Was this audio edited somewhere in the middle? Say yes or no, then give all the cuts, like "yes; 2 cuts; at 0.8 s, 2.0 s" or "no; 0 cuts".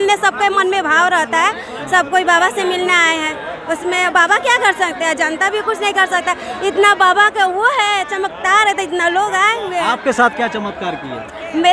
no; 0 cuts